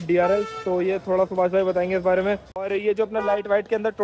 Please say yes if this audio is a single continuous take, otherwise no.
no